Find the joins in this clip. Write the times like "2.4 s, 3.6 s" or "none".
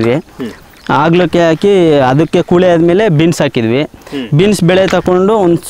none